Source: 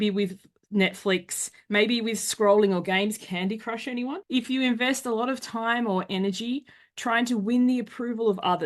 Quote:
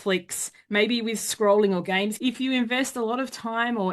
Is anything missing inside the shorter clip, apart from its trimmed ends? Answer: yes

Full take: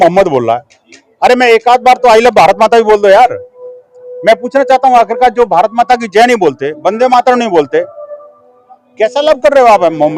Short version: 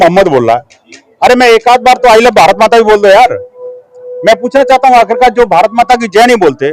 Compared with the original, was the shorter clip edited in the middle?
no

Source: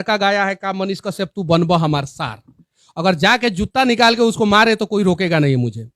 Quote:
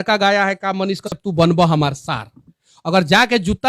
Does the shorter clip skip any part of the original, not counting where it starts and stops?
yes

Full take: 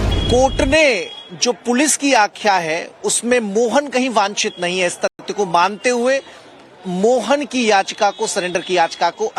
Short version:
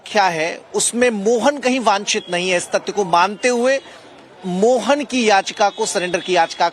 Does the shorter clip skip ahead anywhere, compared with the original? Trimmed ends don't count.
yes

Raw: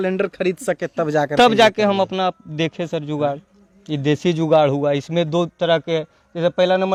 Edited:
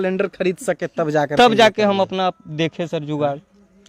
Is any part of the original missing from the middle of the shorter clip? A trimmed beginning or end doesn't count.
no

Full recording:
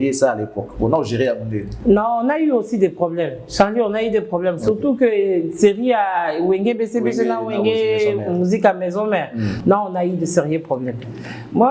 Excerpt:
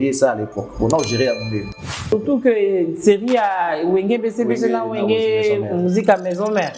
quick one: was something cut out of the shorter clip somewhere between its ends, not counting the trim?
yes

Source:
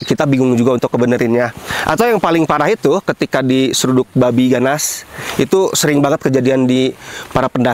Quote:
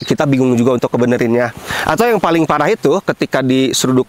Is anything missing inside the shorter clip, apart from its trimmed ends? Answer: no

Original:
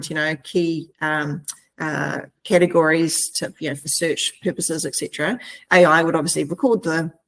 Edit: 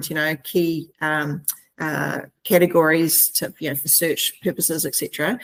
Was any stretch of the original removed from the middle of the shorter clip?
no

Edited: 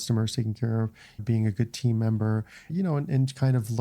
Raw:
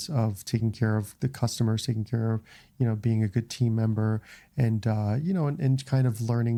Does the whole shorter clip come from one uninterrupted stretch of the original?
no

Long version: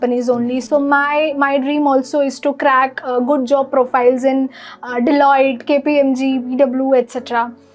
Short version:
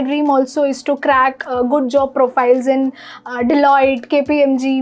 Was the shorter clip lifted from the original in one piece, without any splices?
yes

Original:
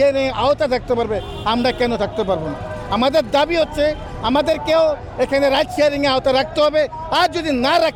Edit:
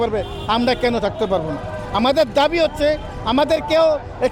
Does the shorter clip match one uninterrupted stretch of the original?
yes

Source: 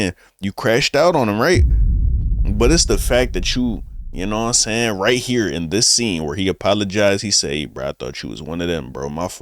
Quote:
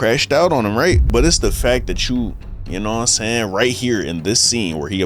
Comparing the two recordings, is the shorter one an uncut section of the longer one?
no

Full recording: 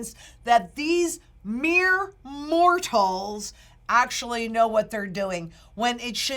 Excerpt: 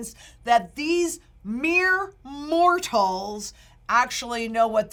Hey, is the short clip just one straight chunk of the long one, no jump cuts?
yes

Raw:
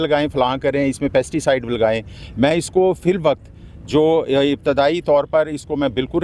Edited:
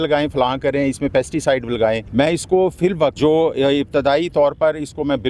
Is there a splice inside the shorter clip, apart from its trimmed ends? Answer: yes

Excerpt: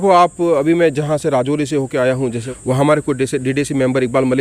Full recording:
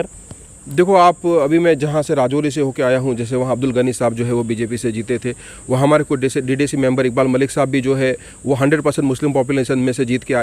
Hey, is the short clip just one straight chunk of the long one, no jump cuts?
no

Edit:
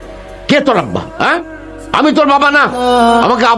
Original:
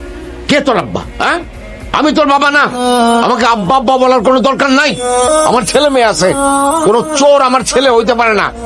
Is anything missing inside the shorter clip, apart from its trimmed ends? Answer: no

